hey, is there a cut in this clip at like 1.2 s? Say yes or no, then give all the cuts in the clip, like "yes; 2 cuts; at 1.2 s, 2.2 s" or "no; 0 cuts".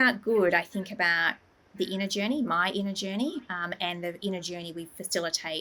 no; 0 cuts